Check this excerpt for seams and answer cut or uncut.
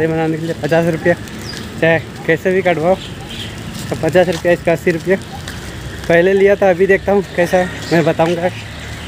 uncut